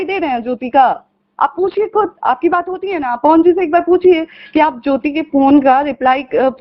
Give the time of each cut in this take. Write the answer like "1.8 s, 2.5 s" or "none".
none